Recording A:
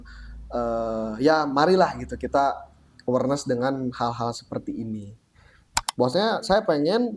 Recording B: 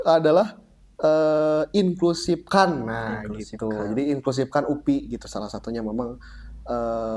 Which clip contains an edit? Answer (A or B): A